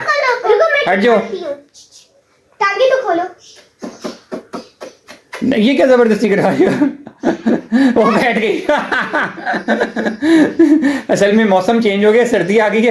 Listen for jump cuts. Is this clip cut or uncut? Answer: uncut